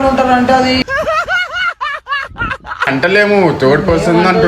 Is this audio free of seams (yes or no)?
no